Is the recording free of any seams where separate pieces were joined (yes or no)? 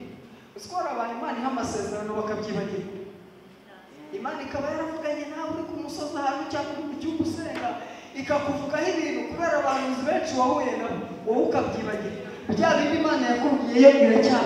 yes